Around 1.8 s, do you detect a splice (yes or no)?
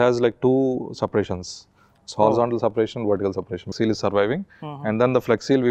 no